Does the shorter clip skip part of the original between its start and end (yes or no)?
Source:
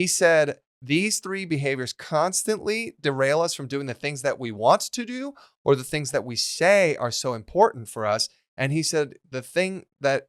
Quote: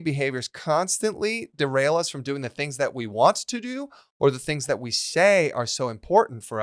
no